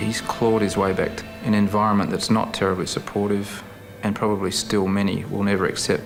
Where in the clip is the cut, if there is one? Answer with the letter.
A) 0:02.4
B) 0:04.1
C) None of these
C